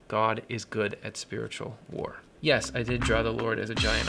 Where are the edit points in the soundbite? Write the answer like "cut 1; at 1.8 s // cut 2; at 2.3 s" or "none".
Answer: cut 1; at 2.2 s